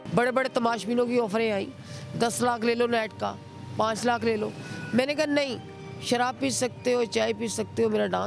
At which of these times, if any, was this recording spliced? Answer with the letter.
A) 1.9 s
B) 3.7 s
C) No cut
C